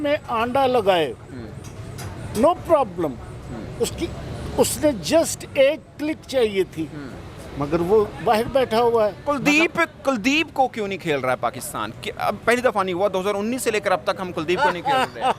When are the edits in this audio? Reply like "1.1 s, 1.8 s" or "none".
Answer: none